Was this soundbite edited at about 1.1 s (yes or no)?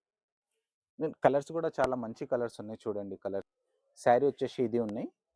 no